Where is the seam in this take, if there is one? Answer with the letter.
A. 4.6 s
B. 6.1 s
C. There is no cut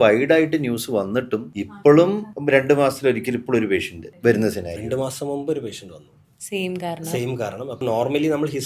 C